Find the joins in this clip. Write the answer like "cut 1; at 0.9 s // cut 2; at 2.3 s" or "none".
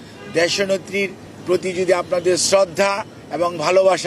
cut 1; at 1.3 s